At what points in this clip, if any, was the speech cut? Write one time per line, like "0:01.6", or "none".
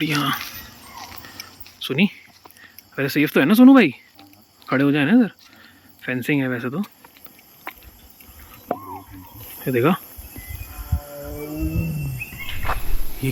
none